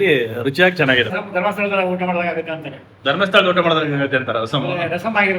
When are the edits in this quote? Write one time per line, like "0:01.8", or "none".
0:01.2